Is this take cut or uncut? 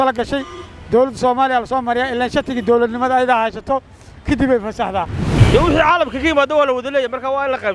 cut